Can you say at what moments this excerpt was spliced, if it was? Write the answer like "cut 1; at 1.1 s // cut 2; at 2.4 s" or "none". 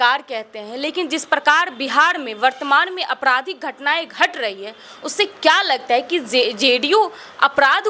none